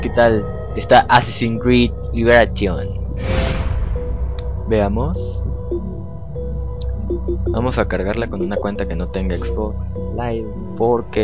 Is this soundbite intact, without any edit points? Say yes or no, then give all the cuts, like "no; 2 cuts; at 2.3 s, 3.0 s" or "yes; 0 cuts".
no; 1 cut; at 6.9 s